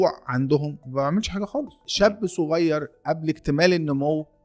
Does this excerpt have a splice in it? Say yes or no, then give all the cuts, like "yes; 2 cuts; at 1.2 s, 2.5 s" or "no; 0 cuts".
yes; 1 cut; at 1.8 s